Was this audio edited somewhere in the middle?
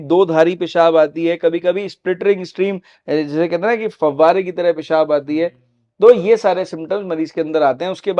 no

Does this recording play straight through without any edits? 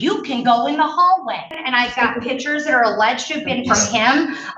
no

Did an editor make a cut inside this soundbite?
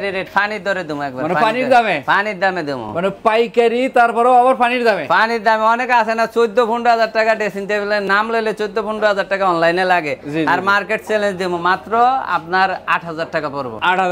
no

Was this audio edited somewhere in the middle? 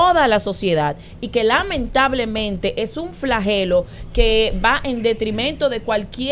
no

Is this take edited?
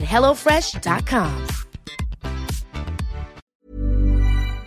yes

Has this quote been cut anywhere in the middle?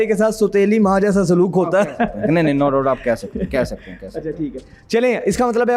no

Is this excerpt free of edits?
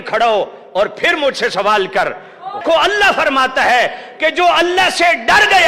no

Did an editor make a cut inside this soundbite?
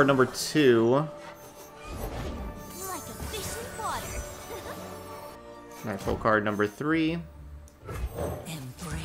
yes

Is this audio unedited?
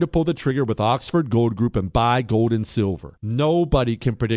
yes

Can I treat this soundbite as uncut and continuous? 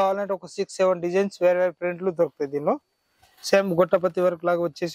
yes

